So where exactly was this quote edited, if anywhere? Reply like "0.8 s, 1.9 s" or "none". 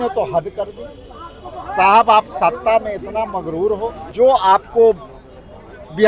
4.0 s